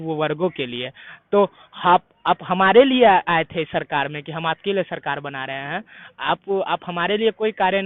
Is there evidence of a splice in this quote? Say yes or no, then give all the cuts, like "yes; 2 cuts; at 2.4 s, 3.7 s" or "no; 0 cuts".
no; 0 cuts